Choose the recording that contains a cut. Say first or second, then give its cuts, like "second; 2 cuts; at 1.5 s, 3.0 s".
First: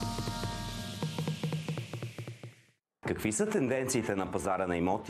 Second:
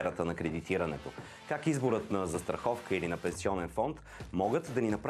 first; 1 cut; at 3.0 s